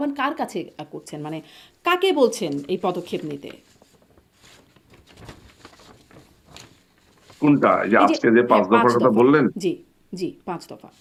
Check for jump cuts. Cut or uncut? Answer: uncut